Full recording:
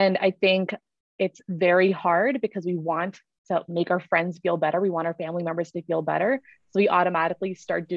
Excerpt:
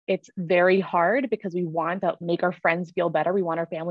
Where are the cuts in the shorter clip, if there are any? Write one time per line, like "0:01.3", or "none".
0:02.0